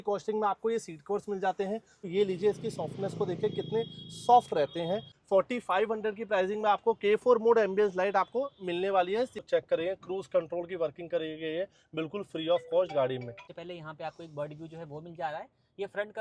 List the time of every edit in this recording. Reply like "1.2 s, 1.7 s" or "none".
2.1 s, 5.1 s, 9.4 s, 13.5 s